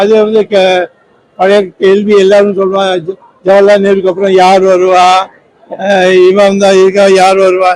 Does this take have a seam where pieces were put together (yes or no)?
no